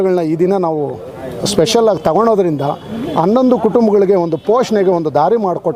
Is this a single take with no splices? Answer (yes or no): yes